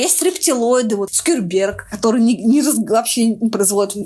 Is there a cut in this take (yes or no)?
no